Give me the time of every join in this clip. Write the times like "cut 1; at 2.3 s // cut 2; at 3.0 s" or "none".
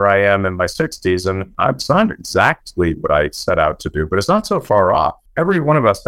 cut 1; at 1.5 s // cut 2; at 5.2 s

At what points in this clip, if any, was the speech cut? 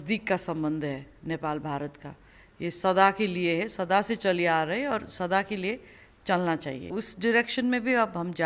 cut 1; at 6.9 s

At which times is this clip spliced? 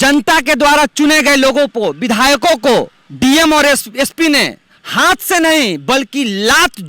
cut 1; at 3.0 s

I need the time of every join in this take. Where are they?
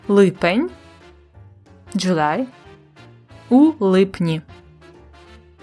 cut 1; at 4.5 s

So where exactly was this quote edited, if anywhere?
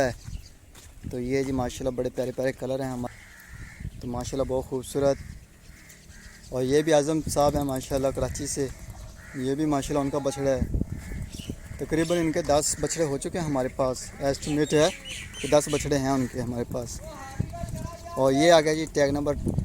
cut 1; at 3.1 s

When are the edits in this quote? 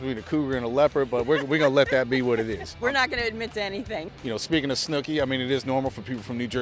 cut 1; at 2.7 s // cut 2; at 4.1 s

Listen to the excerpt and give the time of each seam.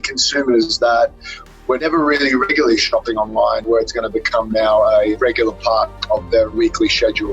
cut 1; at 1.8 s // cut 2; at 3.7 s // cut 3; at 5.1 s // cut 4; at 6.6 s

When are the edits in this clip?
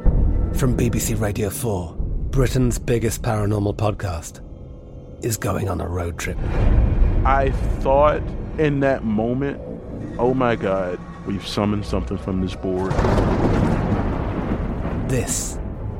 none

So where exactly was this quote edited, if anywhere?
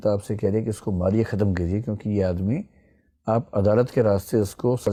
none

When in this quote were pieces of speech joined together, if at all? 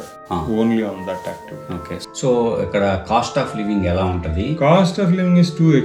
cut 1; at 2.0 s

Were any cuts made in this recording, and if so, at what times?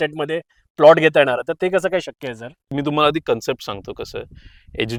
none

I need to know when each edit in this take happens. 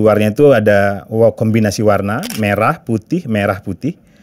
none

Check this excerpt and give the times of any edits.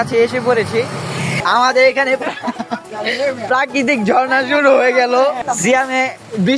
cut 1; at 1.3 s // cut 2; at 5.4 s

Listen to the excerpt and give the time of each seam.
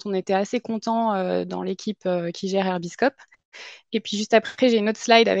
none

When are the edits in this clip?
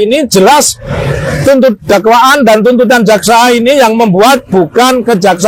none

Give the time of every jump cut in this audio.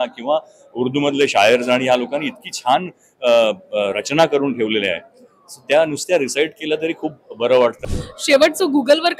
cut 1; at 7.8 s

